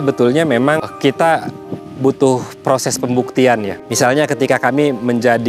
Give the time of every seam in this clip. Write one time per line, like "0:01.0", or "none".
0:00.9
0:03.8